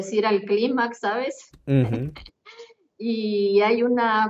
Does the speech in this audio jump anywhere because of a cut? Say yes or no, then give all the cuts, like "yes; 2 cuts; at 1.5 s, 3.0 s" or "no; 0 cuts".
no; 0 cuts